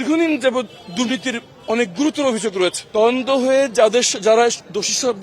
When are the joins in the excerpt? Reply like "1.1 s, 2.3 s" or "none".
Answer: 2.8 s

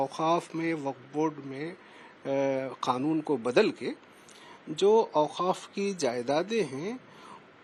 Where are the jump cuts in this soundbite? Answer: none

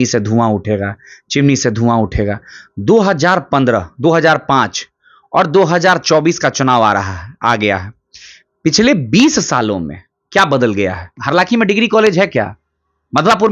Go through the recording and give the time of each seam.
11.1 s

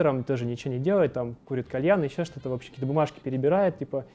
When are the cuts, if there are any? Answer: none

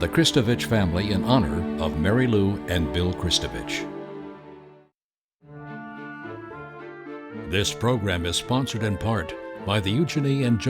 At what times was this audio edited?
5.3 s

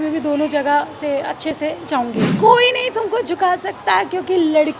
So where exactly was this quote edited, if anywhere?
2.2 s

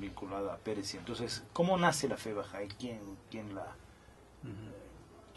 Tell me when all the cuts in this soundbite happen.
0.9 s

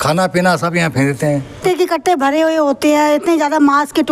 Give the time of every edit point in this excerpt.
1.5 s

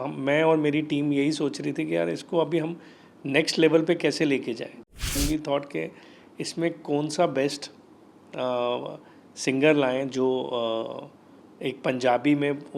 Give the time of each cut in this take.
5.2 s

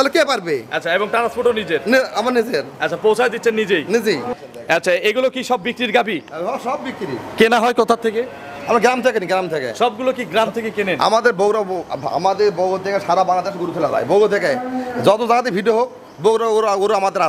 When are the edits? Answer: 4.3 s

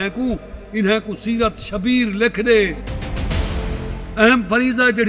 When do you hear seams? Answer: 3.9 s

